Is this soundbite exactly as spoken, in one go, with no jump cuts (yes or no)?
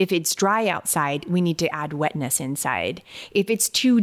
yes